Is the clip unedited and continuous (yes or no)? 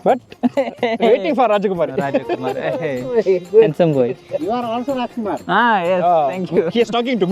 yes